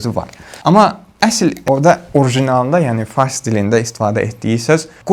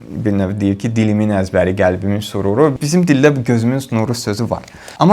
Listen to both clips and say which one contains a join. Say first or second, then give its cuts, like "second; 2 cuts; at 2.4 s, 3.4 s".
second; 1 cut; at 2.7 s